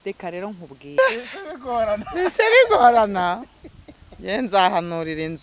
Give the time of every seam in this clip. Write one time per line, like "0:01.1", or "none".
0:01.0

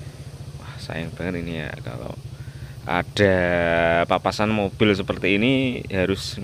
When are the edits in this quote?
none

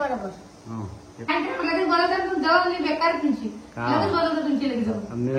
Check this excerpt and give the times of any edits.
0:01.3

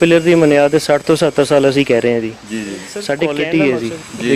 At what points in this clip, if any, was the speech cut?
0:03.3

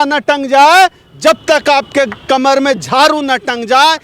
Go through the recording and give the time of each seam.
none

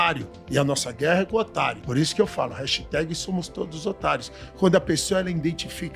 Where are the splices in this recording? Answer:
none

